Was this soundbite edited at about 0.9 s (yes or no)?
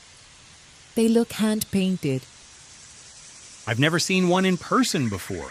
yes